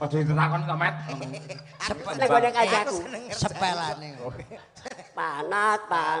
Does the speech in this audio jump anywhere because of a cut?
no; 0 cuts

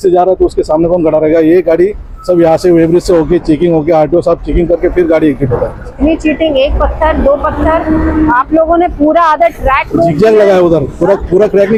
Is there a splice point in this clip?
no; 0 cuts

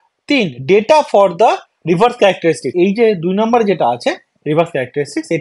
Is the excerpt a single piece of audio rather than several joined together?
yes; 0 cuts

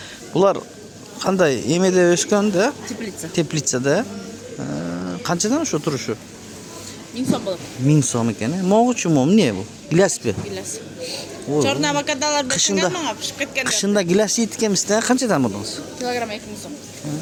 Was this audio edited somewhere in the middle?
no; 0 cuts

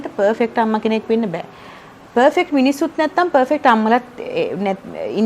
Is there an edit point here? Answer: no; 0 cuts

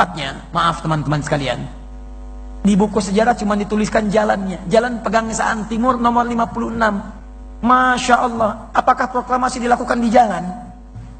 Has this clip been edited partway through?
no; 0 cuts

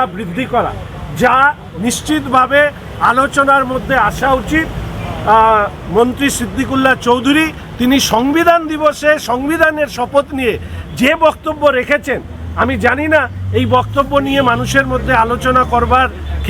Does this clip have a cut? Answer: no; 0 cuts

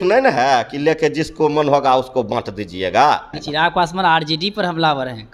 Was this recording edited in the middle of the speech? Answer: yes; 1 cut; at 3.4 s

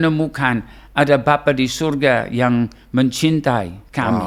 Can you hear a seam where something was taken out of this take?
no; 0 cuts

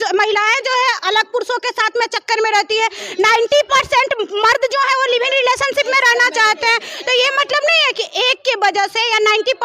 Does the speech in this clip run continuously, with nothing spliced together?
yes; 0 cuts

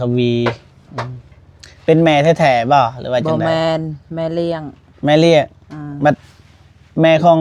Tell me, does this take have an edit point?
no; 0 cuts

